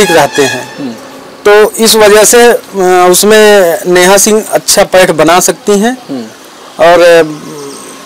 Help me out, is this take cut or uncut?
uncut